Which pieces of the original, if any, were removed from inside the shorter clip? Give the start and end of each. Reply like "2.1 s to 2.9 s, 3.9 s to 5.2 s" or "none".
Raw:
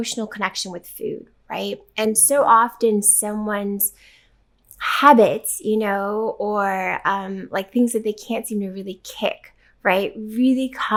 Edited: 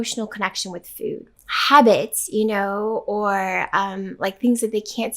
1.3 s to 4.7 s